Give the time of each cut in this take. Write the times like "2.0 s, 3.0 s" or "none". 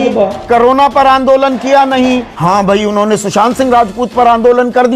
2.3 s